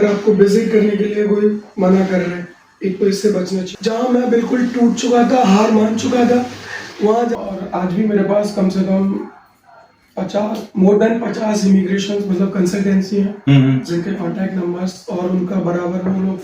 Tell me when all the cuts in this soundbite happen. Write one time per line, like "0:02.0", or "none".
0:03.7
0:07.4